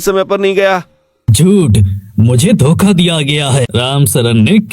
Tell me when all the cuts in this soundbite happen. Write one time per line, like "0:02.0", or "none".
0:03.7